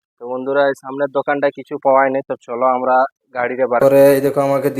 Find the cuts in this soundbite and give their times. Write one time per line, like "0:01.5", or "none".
0:03.8